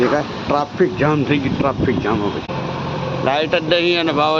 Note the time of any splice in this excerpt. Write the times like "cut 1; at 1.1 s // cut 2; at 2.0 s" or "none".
cut 1; at 2.5 s